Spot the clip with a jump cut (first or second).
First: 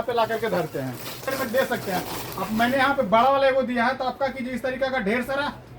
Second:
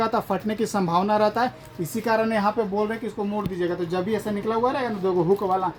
first